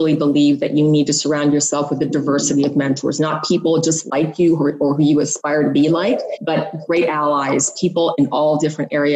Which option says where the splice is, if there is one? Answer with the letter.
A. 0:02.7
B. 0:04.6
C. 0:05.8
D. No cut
D